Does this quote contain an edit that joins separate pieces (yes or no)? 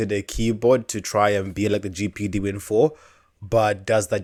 no